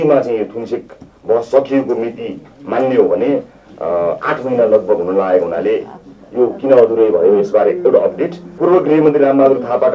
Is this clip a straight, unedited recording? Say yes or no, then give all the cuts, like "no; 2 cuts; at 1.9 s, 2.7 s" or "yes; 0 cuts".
no; 1 cut; at 8.4 s